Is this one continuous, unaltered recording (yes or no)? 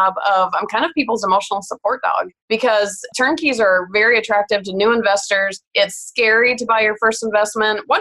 no